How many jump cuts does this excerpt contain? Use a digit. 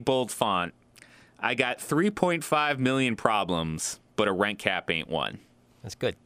0